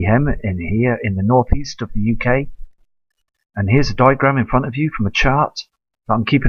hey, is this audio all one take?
no; 1 cut; at 4.0 s

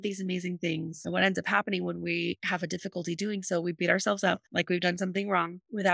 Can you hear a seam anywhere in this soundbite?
no; 0 cuts

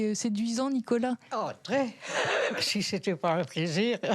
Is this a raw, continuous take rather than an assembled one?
no; 1 cut; at 2.6 s

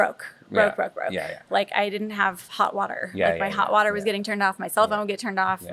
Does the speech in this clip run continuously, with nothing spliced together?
yes; 0 cuts

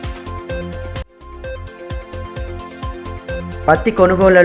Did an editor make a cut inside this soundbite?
yes; 2 cuts; at 1.0 s, 3.3 s

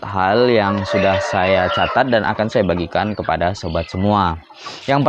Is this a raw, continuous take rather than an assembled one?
yes; 0 cuts

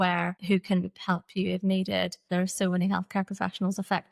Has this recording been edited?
yes; 1 cut; at 2.2 s

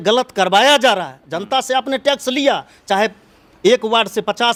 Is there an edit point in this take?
no; 0 cuts

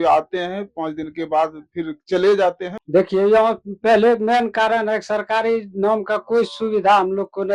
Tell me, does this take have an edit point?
yes; 1 cut; at 2.7 s

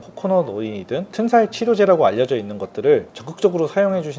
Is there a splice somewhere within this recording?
no; 0 cuts

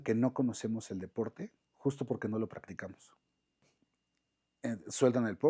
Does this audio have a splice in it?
yes; 1 cut; at 3.7 s

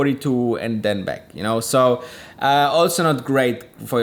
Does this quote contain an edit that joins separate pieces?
no; 0 cuts

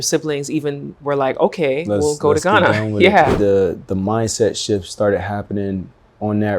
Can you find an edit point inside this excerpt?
yes; 1 cut; at 3.3 s

